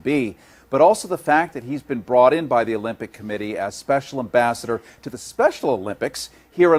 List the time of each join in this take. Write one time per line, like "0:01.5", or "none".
none